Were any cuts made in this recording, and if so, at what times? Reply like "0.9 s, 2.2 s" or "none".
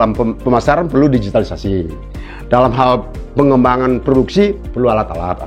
none